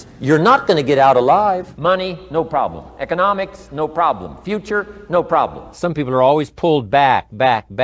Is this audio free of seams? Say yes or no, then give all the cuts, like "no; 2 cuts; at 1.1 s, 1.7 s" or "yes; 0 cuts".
no; 2 cuts; at 1.7 s, 5.8 s